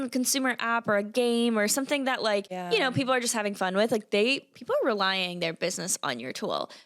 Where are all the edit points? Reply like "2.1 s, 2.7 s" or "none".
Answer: 2.5 s